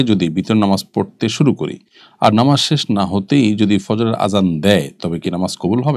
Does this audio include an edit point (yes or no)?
no